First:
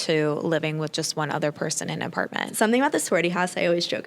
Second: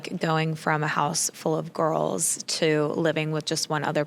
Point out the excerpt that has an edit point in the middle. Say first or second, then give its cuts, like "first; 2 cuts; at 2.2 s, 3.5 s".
first; 1 cut; at 2.5 s